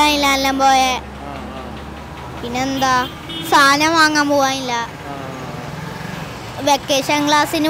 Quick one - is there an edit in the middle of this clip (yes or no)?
no